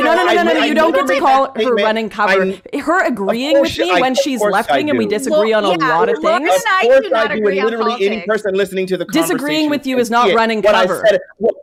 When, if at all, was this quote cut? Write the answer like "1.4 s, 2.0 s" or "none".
none